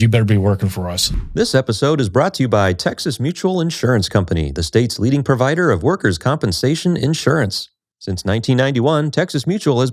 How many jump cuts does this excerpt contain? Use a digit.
1